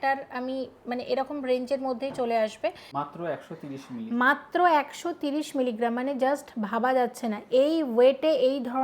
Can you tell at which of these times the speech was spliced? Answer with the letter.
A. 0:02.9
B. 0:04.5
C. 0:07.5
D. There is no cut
A